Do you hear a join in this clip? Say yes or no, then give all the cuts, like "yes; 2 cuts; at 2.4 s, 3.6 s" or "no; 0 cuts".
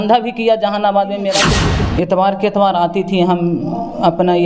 yes; 1 cut; at 1.6 s